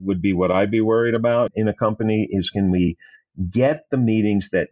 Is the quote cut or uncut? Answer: cut